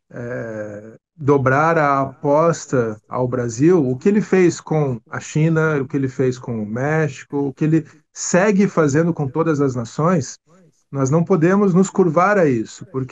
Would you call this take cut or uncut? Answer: uncut